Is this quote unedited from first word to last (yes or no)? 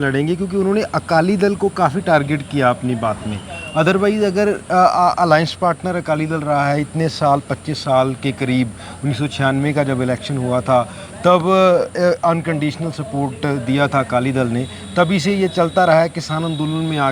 yes